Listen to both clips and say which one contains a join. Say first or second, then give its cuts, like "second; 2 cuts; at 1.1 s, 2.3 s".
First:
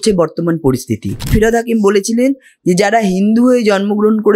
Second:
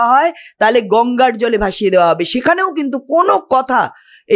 first; 1 cut; at 1.3 s